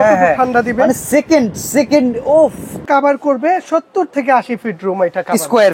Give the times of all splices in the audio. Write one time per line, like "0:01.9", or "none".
0:02.8